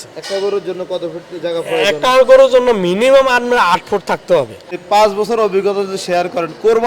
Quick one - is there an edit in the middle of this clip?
yes; 1 cut; at 4.8 s

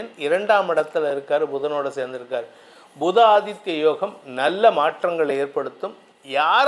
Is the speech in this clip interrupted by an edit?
no; 0 cuts

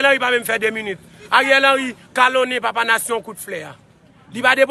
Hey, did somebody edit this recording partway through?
no; 0 cuts

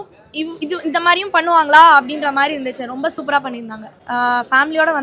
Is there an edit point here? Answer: yes; 1 cut; at 4.0 s

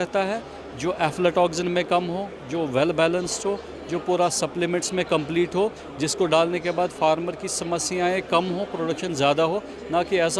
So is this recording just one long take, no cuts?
yes; 0 cuts

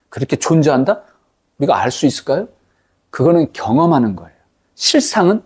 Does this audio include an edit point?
no; 0 cuts

